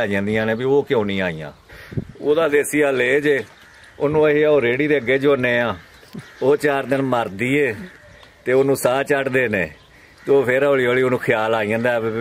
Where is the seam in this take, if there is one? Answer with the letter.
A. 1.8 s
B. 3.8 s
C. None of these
A